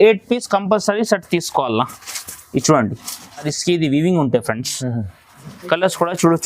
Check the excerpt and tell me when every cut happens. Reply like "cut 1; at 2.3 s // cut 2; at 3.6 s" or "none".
cut 1; at 3.5 s